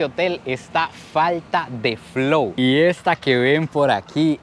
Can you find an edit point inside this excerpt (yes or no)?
yes